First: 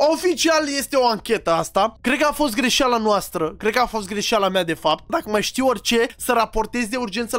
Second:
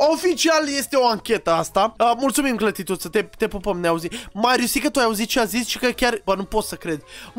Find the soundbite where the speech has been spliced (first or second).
first